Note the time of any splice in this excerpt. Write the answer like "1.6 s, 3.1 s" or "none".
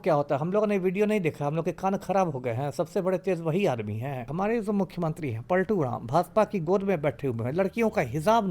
4.3 s